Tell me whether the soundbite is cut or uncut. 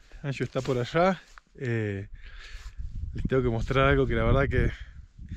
uncut